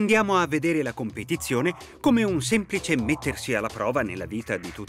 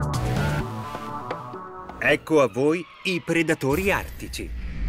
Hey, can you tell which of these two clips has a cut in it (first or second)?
first